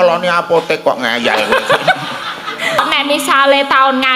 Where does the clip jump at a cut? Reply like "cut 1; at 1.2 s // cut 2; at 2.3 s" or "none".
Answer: cut 1; at 2.8 s